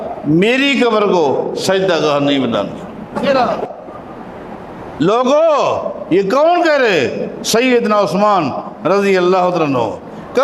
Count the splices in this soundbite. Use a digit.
1